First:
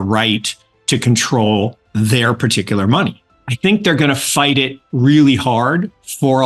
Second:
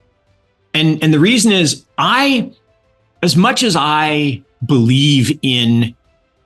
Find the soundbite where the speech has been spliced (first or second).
first